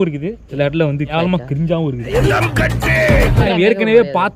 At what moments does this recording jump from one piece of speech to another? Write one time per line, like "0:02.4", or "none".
0:02.2
0:03.4

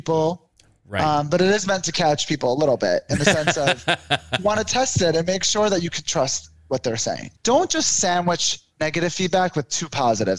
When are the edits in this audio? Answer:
0:07.3

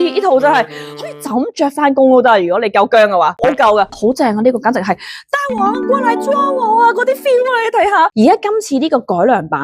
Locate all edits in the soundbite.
0:03.9
0:08.1

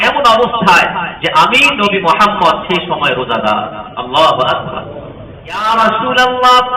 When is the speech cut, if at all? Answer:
0:05.6

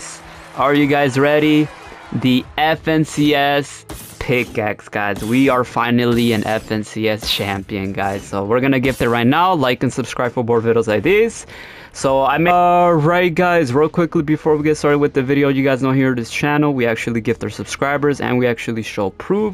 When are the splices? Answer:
0:12.5

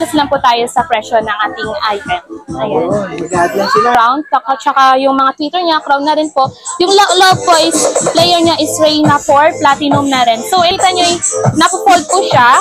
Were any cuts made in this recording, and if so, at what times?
0:03.9
0:10.7

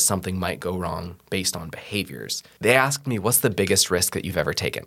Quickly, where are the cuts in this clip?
0:02.4

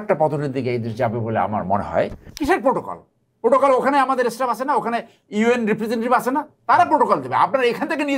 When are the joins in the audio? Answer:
0:02.3

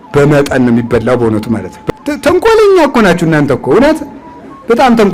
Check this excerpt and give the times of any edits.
0:01.7

